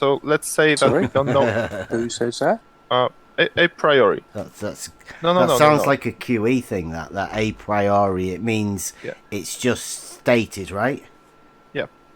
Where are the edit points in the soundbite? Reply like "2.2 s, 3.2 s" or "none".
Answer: 2.7 s, 4.3 s